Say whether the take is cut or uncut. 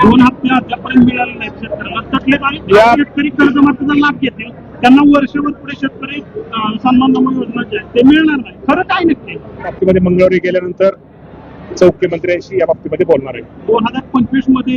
cut